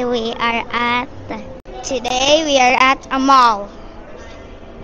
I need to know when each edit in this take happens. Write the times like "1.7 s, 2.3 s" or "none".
1.6 s